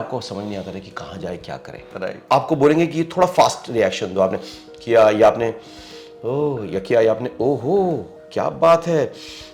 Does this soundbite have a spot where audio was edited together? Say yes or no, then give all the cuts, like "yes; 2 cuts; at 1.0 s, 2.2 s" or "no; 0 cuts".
yes; 1 cut; at 2.2 s